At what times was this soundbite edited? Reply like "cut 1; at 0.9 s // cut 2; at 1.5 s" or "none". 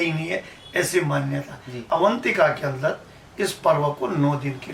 cut 1; at 1.8 s